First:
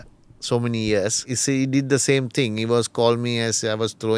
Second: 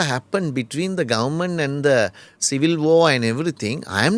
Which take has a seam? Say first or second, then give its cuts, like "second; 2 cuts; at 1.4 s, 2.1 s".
first; 1 cut; at 1.3 s